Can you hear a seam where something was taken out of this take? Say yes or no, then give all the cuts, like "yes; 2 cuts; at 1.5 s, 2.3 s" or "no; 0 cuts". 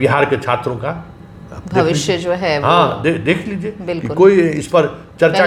no; 0 cuts